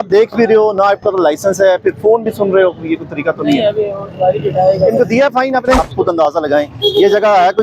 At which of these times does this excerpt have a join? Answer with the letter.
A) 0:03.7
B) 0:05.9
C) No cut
B